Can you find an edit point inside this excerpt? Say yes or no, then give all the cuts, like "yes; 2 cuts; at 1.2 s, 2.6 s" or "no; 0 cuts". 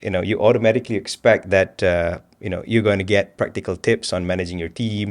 no; 0 cuts